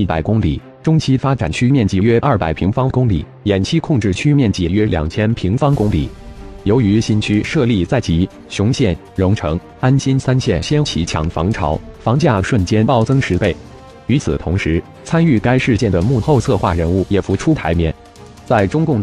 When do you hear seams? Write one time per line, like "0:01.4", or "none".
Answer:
none